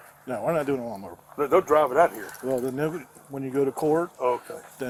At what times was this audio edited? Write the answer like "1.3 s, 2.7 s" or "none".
none